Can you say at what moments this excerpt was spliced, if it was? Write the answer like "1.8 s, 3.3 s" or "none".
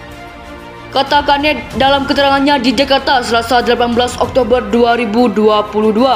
0.9 s

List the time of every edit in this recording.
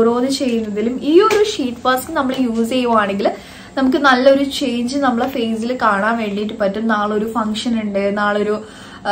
none

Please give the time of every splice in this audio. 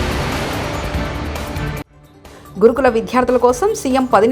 1.9 s

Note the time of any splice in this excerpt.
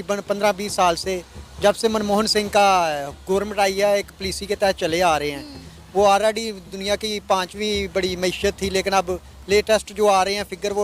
none

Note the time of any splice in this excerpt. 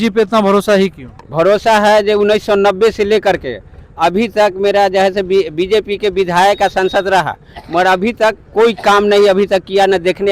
none

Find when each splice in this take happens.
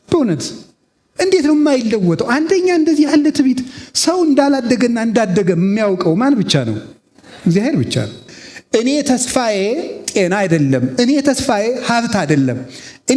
8.2 s

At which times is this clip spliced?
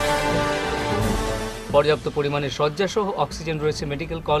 1.3 s

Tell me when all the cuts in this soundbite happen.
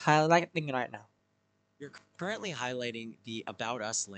none

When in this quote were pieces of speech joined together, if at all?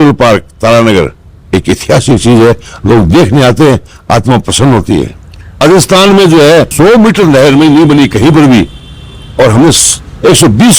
5.6 s

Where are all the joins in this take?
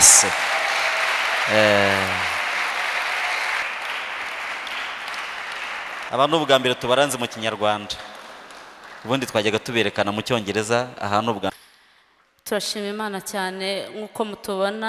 3.6 s, 11.5 s

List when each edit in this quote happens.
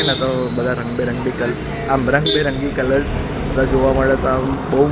none

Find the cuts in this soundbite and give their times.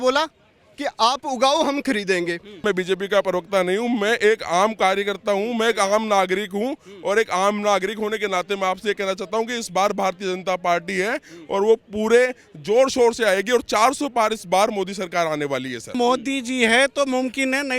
2.6 s, 15.8 s

